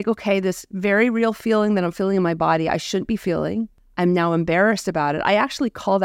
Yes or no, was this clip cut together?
yes